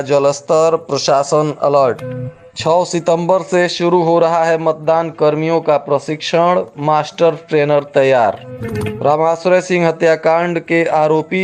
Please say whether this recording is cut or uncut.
uncut